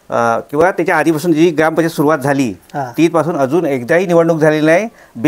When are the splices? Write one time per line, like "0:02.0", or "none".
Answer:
none